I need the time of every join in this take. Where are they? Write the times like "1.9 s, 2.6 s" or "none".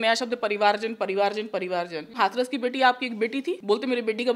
2.1 s, 3.6 s